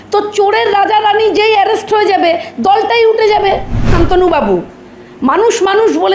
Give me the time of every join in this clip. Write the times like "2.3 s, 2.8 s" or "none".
3.9 s

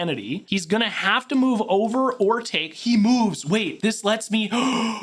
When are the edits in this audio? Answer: none

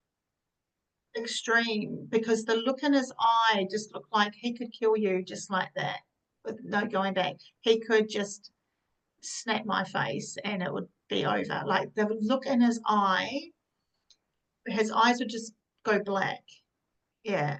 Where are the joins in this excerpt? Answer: none

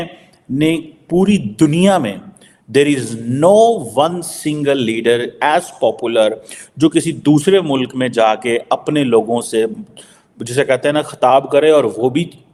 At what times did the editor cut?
none

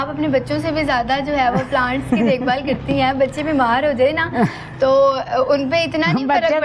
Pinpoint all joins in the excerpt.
none

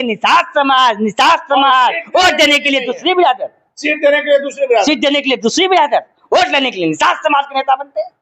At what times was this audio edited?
none

